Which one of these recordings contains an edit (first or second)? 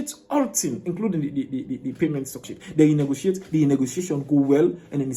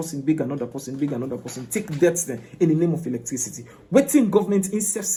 first